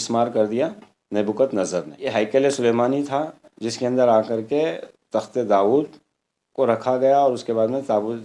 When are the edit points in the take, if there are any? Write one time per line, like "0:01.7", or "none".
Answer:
0:02.0